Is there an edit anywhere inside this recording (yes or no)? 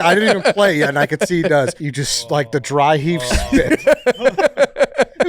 yes